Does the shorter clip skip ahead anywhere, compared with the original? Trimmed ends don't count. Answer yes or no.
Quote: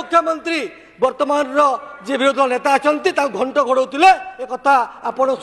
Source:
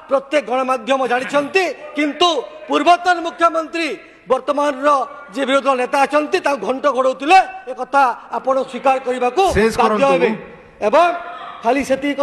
no